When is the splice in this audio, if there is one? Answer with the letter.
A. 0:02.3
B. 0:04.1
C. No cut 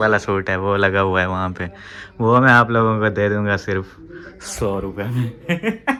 C